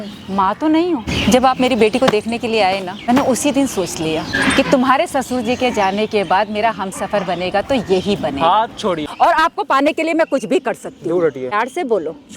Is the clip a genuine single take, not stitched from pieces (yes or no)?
no